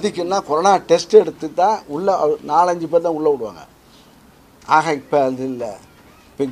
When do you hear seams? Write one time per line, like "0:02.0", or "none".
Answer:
none